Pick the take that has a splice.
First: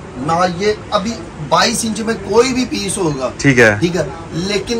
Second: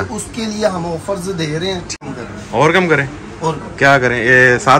second; 1 cut; at 1.9 s

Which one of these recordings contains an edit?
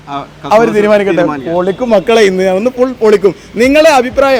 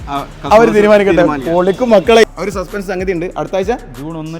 second; 1 cut; at 2.2 s

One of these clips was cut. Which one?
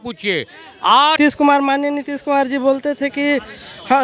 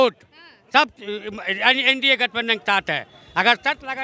first; 1 cut; at 1.2 s

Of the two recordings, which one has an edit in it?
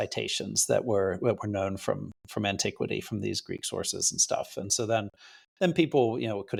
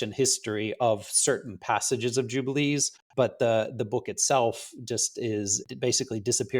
second; 2 cuts; at 3.0 s, 5.6 s

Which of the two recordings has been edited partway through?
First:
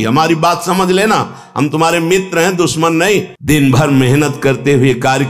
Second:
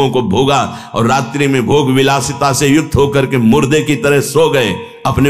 first; 1 cut; at 3.3 s

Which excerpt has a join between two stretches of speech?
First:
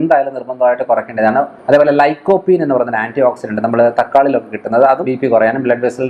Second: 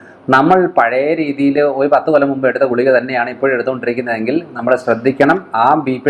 first; 2 cuts; at 1.6 s, 5.1 s

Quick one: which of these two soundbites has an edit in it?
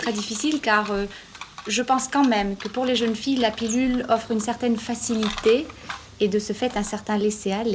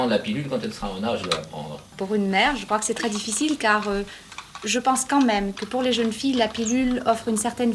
second; 1 cut; at 1.9 s

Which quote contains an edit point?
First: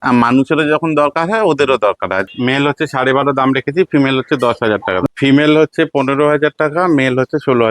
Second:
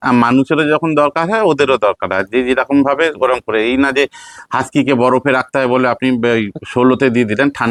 first; 2 cuts; at 2.3 s, 5.0 s

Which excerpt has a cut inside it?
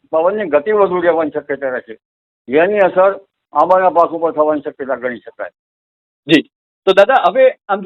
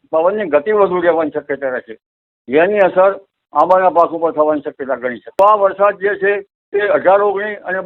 second; 1 cut; at 5.4 s

